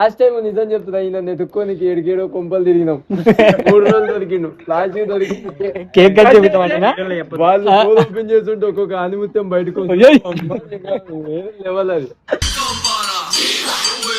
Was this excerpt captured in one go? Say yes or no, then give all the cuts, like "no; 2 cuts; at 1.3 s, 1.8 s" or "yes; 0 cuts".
yes; 0 cuts